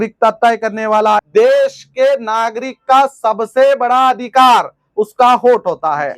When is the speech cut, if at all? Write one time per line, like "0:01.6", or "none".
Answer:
0:01.2